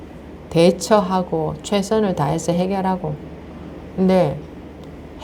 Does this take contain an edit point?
no; 0 cuts

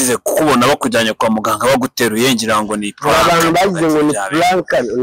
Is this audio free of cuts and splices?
yes; 0 cuts

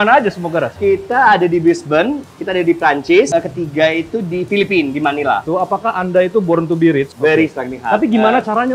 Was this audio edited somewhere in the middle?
yes; 3 cuts; at 3.3 s, 5.4 s, 7.1 s

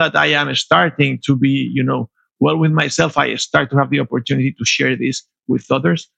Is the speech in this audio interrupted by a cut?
no; 0 cuts

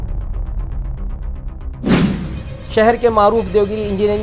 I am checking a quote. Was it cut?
yes; 1 cut; at 2.5 s

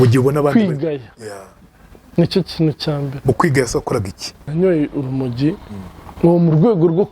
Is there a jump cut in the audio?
yes; 1 cut; at 4.4 s

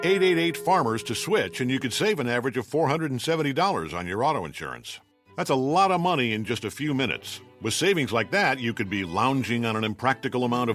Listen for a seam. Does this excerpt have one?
yes; 1 cut; at 1.0 s

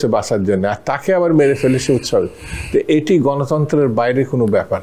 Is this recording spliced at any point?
no; 0 cuts

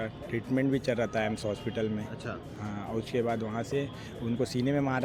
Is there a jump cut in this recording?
no; 0 cuts

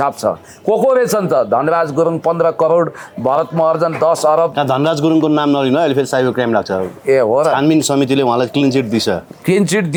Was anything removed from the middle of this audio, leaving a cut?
no; 0 cuts

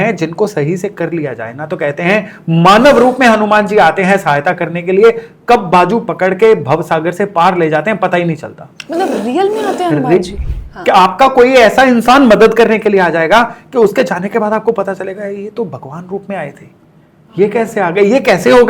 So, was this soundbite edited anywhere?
yes; 1 cut; at 10.3 s

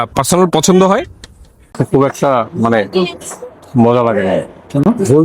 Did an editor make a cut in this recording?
yes; 1 cut; at 1.8 s

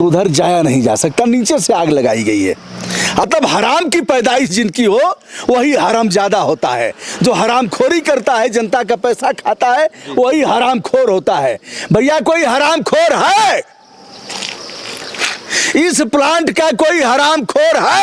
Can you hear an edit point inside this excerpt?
yes; 1 cut; at 3.2 s

